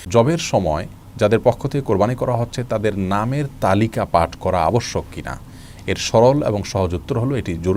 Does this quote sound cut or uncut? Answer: uncut